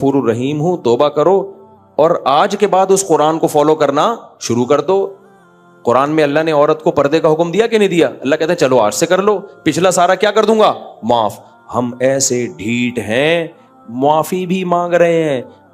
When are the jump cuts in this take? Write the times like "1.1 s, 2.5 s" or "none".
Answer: none